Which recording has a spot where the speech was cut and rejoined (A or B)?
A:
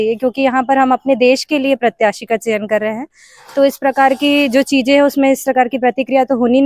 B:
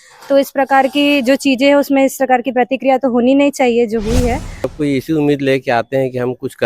B